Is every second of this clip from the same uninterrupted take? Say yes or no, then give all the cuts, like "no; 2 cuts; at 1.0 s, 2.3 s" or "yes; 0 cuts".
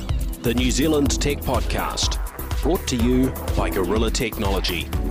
yes; 0 cuts